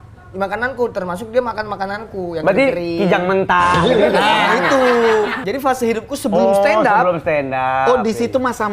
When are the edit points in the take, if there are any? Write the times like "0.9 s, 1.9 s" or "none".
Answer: 5.4 s